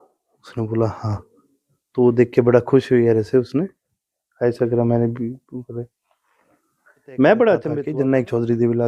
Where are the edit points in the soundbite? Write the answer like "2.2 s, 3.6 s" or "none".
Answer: 7.8 s

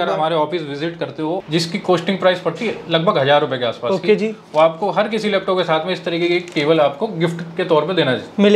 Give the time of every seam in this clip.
1.4 s

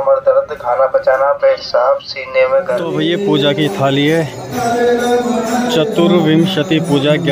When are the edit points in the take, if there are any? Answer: 2.9 s

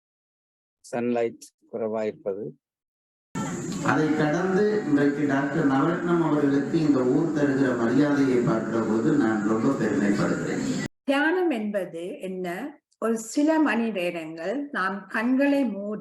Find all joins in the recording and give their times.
3.4 s, 10.8 s

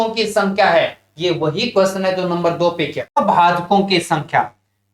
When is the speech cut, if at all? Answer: 3.2 s

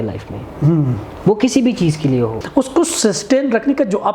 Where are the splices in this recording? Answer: 2.4 s

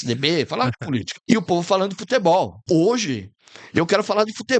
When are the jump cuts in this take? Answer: 1.1 s, 2.6 s

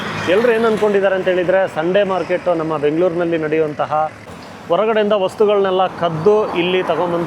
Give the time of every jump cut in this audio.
4.3 s

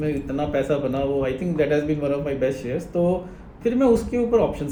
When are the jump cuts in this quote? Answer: none

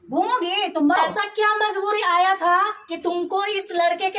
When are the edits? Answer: 1.0 s

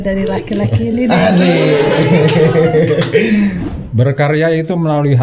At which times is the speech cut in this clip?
3.6 s

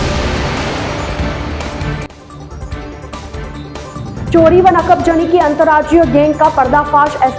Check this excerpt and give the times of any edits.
3.8 s

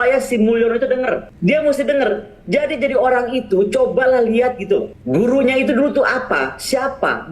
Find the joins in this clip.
1.3 s, 5.0 s

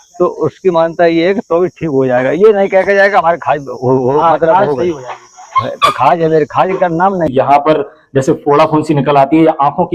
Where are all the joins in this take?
7.3 s

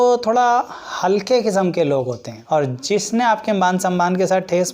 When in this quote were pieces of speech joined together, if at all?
2.3 s

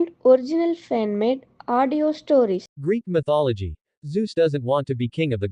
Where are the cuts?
2.7 s

